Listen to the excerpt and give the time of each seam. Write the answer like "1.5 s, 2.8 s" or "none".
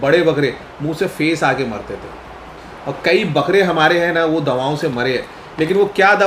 none